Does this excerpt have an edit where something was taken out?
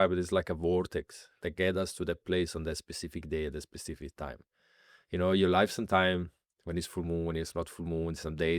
no; 0 cuts

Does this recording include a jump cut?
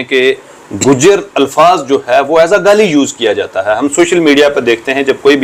no; 0 cuts

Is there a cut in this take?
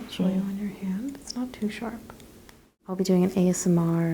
yes; 1 cut; at 2.8 s

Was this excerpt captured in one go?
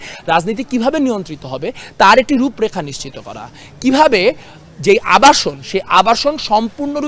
yes; 0 cuts

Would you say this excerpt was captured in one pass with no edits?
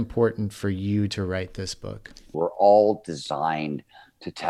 no; 1 cut; at 2.2 s

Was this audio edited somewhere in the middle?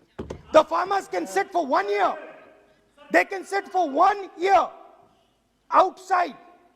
no; 0 cuts

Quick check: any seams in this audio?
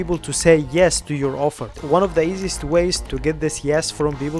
yes; 1 cut; at 3.1 s

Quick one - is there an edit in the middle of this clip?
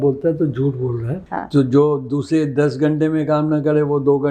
yes; 1 cut; at 1.2 s

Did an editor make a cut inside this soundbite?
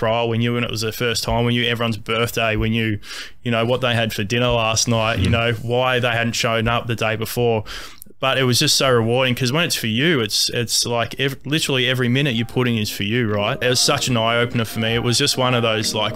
yes; 1 cut; at 13.6 s

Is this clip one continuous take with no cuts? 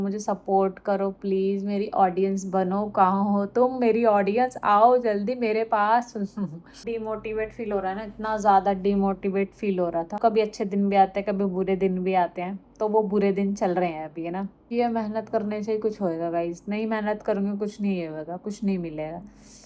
no; 3 cuts; at 6.8 s, 10.2 s, 14.7 s

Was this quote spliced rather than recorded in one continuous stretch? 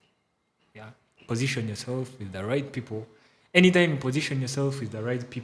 no; 0 cuts

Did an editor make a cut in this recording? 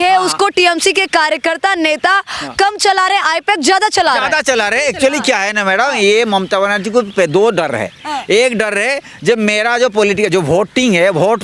no; 0 cuts

